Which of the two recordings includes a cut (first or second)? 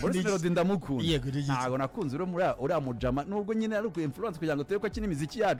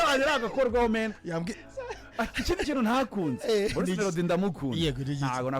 second